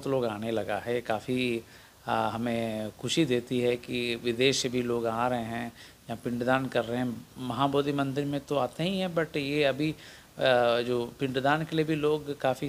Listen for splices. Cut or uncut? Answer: uncut